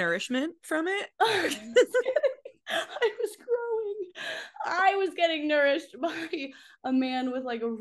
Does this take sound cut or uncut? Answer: uncut